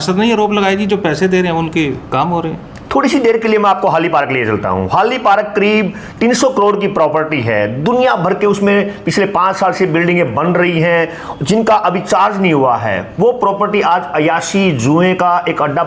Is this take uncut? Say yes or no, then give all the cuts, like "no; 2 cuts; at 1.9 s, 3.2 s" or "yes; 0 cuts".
yes; 0 cuts